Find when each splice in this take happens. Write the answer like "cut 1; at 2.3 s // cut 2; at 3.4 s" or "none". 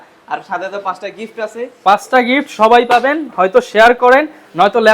none